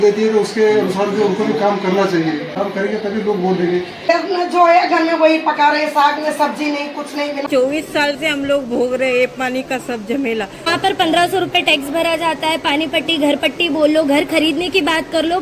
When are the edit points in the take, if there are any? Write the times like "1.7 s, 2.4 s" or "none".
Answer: 2.5 s, 4.1 s, 7.4 s, 10.7 s

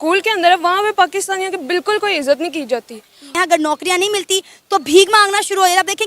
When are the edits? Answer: 3.3 s

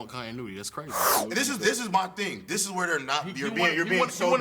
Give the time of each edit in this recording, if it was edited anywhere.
1.1 s

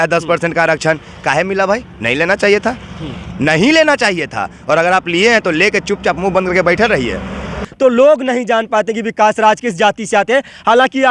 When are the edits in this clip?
7.6 s

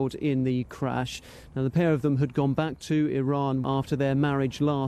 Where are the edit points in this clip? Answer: 3.6 s

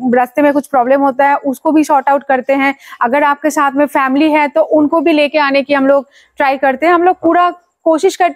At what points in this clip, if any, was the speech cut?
none

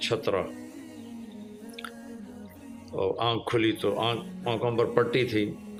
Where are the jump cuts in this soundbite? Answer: none

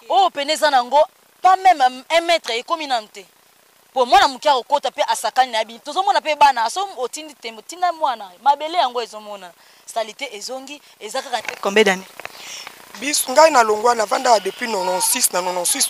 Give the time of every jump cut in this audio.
11.4 s

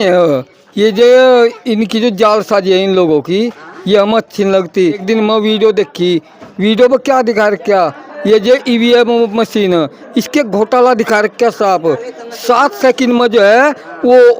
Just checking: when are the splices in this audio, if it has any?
5.0 s

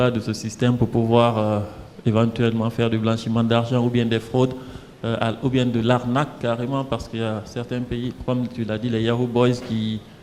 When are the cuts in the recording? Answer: none

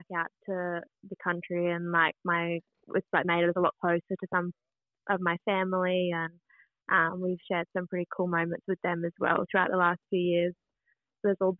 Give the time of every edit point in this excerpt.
none

